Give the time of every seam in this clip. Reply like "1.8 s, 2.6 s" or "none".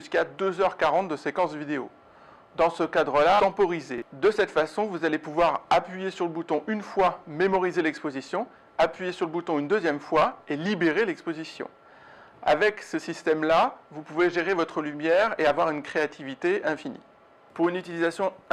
none